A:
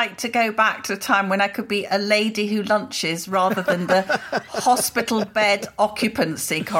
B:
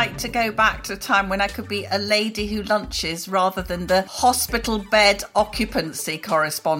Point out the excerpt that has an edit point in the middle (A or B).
B